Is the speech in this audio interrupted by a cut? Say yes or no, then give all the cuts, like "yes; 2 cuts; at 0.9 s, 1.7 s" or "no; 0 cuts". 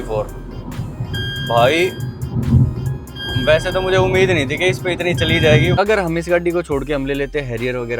yes; 1 cut; at 5.8 s